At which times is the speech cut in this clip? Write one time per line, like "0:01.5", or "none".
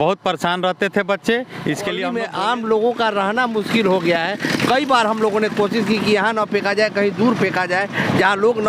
0:02.1